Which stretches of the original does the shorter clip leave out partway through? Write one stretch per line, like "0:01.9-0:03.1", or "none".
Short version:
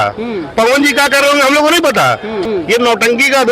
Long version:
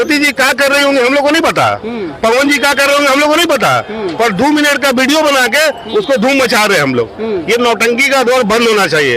0:04.1-0:07.2